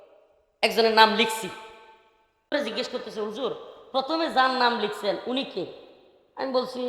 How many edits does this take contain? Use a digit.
1